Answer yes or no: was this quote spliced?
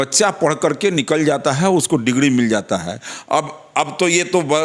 no